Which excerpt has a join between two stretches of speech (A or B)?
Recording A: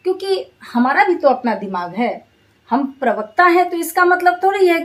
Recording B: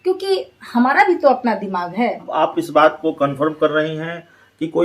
B